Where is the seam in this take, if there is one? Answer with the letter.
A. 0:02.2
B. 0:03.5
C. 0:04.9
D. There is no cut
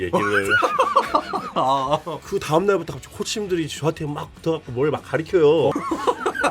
A